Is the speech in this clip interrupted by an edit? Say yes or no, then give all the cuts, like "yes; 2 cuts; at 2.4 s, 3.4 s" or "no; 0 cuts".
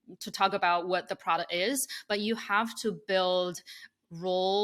no; 0 cuts